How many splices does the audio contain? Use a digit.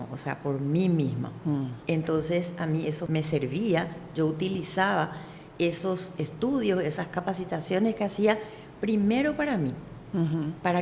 1